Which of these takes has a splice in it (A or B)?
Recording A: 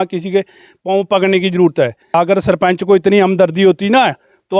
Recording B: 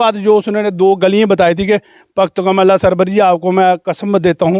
A